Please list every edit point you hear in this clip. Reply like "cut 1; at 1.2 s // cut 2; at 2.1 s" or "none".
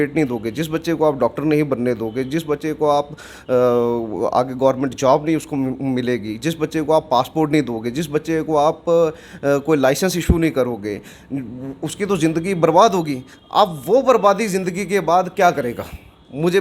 none